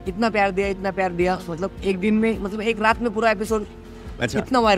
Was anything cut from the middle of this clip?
no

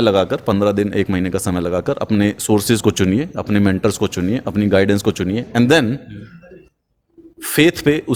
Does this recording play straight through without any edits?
yes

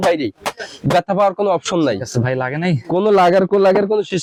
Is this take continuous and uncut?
yes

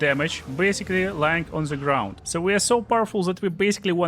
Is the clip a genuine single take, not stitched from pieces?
no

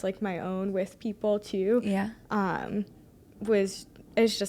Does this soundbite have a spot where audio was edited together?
no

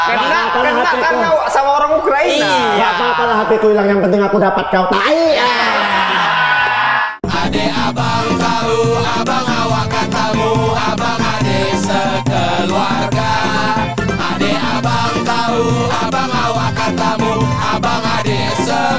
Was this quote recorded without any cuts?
no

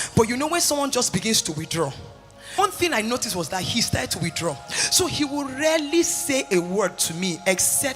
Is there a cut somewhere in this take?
yes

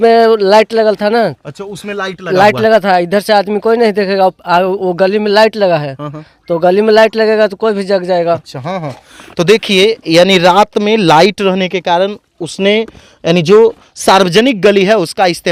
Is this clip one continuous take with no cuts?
yes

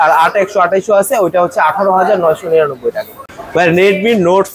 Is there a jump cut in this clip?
yes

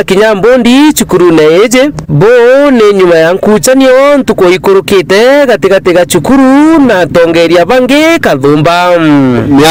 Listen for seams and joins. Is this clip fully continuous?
yes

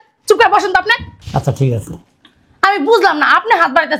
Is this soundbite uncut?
no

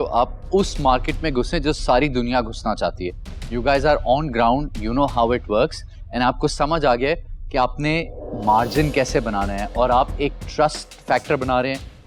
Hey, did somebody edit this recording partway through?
no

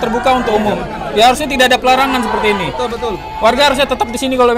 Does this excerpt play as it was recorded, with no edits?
yes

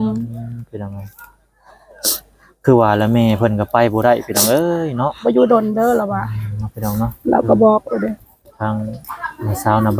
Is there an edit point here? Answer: yes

